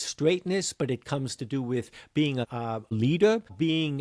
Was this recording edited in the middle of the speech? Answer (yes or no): yes